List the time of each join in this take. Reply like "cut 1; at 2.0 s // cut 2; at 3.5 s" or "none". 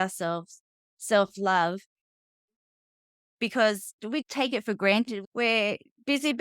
cut 1; at 4.0 s // cut 2; at 5.2 s

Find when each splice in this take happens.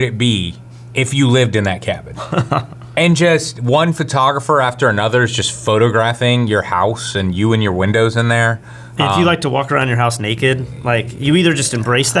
none

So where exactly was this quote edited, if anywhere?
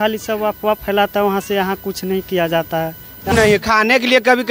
cut 1; at 3.3 s

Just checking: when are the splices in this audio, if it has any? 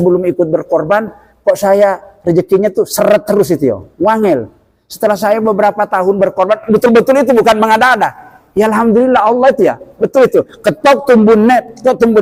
none

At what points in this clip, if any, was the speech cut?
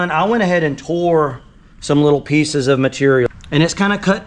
cut 1; at 3.3 s

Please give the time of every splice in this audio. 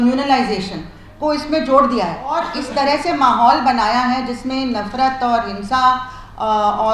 cut 1; at 2.5 s

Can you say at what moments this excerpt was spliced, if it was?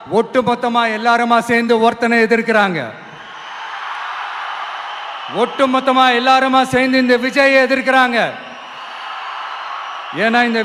none

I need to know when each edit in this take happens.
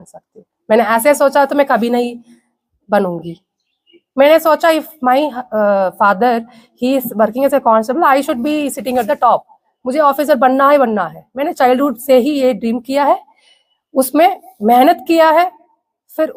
none

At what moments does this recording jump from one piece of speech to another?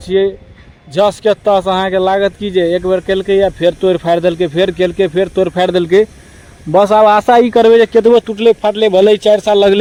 none

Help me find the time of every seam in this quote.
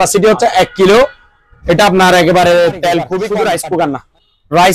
cut 1; at 3.1 s

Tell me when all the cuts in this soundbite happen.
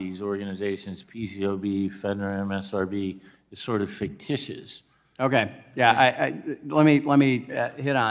none

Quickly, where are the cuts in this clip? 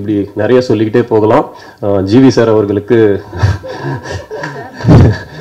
none

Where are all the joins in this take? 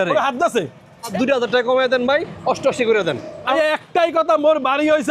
cut 1; at 1.1 s // cut 2; at 3.4 s

